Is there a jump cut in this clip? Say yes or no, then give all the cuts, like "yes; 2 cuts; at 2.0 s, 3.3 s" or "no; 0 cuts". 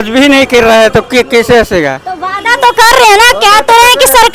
no; 0 cuts